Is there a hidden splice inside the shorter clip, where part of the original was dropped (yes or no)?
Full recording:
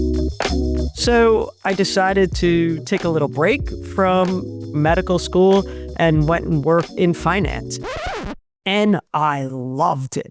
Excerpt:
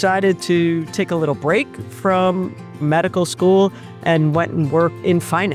no